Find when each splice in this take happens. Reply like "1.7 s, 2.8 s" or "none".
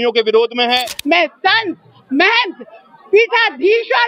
0.9 s